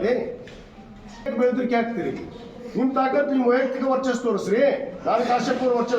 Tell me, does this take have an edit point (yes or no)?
yes